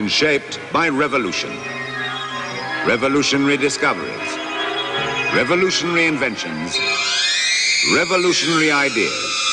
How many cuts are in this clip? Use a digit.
1